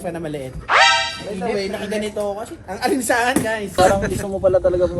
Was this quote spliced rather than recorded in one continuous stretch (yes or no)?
yes